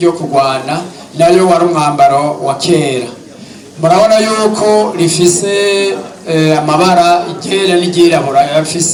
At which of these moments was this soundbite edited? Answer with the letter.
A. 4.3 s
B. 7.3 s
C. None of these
C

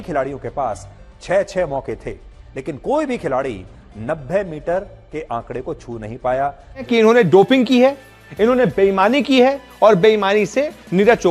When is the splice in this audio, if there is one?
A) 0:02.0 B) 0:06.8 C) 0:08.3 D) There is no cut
B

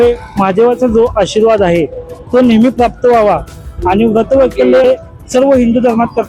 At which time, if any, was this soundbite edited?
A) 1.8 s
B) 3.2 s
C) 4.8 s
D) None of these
C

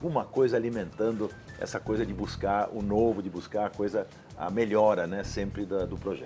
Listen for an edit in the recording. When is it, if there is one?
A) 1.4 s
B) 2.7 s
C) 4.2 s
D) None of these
D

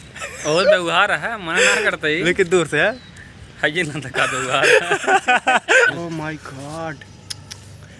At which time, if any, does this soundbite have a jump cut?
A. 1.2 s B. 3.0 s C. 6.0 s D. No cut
C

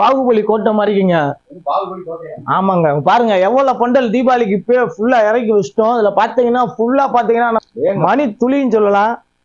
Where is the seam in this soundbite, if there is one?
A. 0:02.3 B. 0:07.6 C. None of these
B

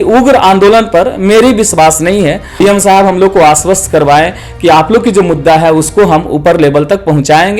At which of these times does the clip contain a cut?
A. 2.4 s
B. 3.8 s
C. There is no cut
A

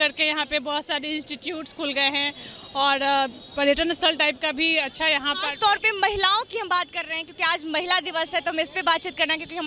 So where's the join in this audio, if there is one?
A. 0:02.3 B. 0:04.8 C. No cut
C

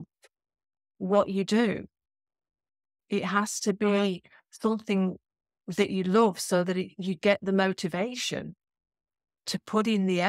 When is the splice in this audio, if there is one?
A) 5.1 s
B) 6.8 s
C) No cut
C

